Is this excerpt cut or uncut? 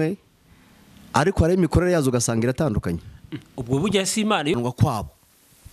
cut